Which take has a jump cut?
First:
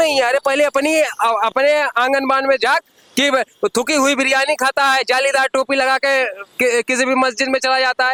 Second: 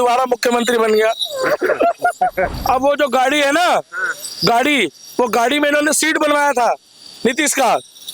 second; 1 cut; at 2.5 s

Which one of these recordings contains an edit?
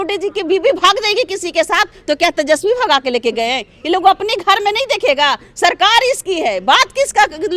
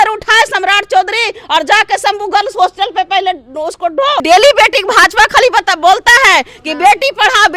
second; 1 cut; at 4.2 s

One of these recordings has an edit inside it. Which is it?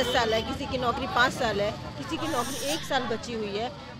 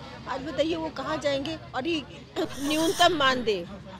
second; 1 cut; at 2.5 s

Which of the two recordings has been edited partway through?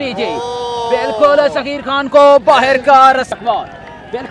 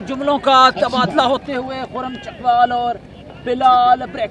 first; 1 cut; at 3.3 s

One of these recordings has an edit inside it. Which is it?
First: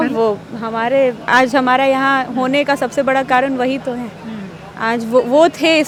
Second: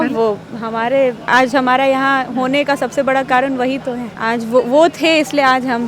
second; 1 cut; at 4.1 s

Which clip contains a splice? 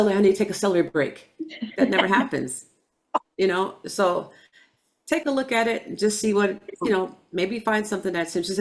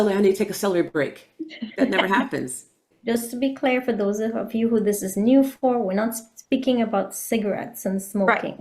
second; 1 cut; at 2.9 s

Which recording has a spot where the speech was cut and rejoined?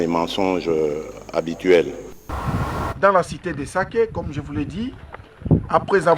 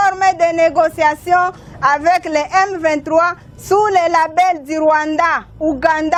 first; 1 cut; at 2.3 s

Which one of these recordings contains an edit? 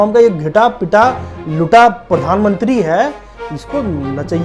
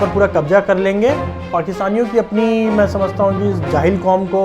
second; 1 cut; at 1.3 s

